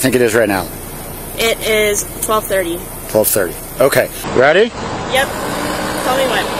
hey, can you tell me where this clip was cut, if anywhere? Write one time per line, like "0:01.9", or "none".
0:04.2